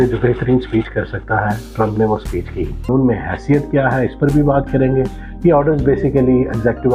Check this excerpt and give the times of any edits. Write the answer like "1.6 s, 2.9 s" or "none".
2.9 s

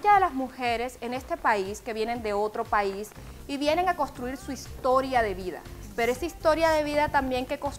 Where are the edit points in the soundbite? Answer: 2.8 s

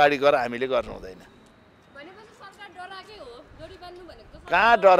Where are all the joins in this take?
none

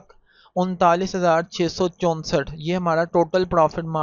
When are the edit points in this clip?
none

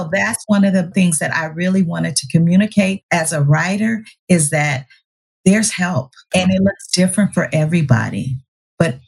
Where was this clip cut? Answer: 0.9 s, 3.0 s, 6.3 s

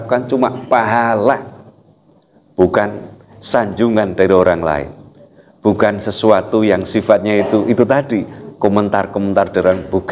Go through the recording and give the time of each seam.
none

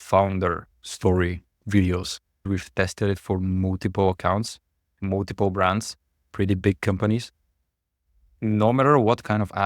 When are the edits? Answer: 2.4 s

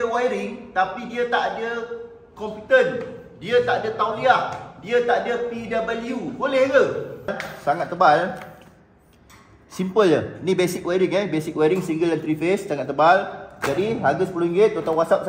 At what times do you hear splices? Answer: 7.5 s

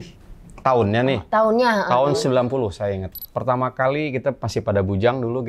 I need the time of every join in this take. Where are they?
3.1 s

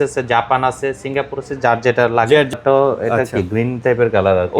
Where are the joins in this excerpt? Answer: 2.5 s

